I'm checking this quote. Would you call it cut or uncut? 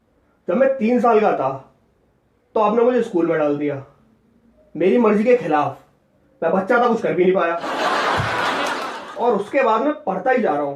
cut